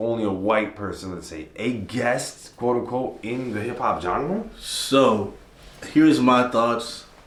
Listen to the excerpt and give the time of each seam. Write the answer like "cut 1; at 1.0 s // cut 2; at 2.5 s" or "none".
none